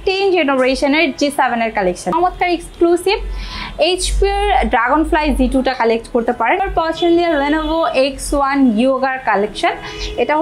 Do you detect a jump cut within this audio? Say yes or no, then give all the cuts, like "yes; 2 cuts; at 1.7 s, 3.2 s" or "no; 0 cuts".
yes; 2 cuts; at 2.1 s, 6.6 s